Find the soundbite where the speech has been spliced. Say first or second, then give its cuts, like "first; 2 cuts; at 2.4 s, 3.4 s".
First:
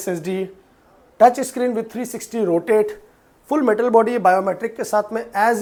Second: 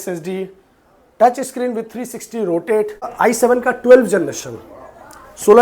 second; 1 cut; at 3.1 s